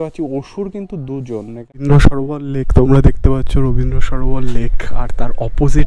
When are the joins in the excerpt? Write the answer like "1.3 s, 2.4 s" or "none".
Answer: 1.8 s